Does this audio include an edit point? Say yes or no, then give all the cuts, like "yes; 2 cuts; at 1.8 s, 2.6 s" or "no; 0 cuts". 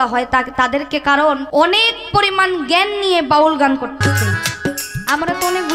yes; 2 cuts; at 1.4 s, 3.9 s